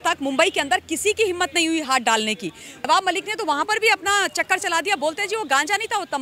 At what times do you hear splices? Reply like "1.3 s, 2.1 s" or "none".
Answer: 2.7 s